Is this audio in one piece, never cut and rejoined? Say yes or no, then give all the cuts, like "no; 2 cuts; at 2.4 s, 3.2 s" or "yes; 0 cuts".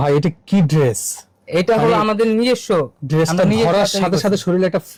yes; 0 cuts